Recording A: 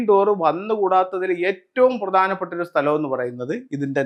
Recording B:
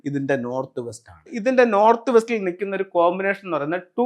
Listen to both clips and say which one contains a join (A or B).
B